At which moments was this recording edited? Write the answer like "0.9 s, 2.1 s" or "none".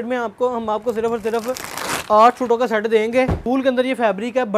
3.4 s